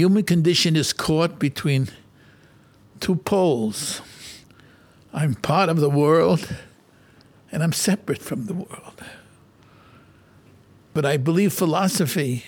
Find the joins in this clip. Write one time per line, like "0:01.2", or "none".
0:10.9